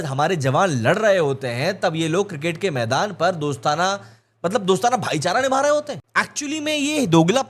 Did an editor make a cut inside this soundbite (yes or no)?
no